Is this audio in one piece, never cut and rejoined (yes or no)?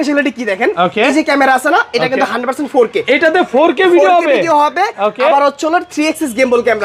yes